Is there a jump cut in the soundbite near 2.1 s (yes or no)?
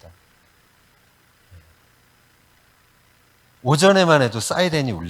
no